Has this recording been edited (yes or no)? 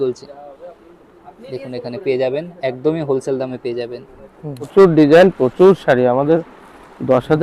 yes